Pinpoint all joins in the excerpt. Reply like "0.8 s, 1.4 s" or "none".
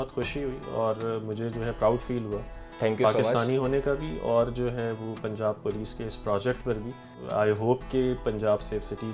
7.2 s